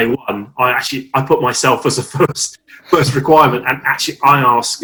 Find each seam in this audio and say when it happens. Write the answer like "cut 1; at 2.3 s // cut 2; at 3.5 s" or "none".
none

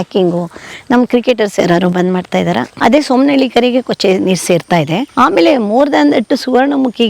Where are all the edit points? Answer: cut 1; at 2.7 s // cut 2; at 5.1 s

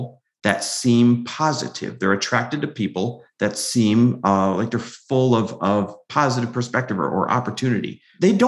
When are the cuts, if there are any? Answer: none

